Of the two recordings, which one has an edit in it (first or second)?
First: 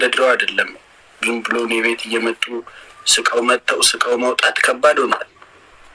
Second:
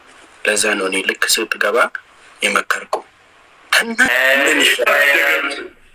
second